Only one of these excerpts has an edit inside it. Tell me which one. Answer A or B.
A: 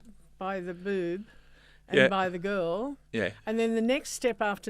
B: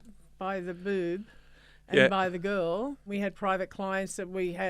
B